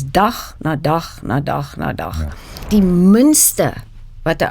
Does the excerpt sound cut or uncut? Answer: cut